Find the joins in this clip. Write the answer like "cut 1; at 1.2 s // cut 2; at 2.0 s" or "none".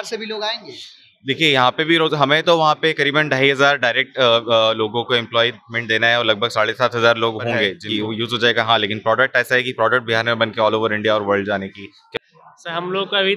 cut 1; at 7.8 s // cut 2; at 12.1 s